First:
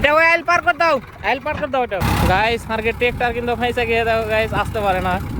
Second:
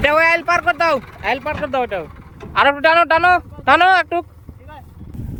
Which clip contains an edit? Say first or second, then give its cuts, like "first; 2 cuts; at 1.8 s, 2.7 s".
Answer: first; 1 cut; at 2.0 s